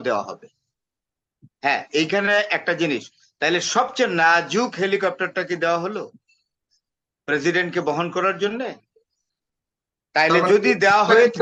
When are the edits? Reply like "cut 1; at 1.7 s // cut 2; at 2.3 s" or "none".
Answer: none